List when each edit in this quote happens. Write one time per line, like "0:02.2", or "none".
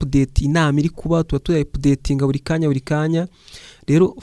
none